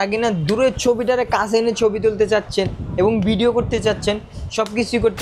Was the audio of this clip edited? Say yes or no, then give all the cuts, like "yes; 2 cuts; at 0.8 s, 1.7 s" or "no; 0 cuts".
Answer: no; 0 cuts